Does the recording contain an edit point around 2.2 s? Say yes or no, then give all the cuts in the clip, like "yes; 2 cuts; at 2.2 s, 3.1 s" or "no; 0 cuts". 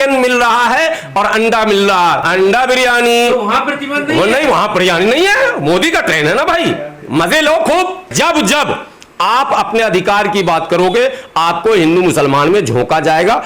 yes; 2 cuts; at 2.2 s, 8.1 s